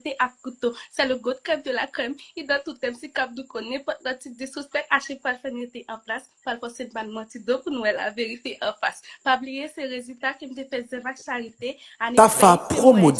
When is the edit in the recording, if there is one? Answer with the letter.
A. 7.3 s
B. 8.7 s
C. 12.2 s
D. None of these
C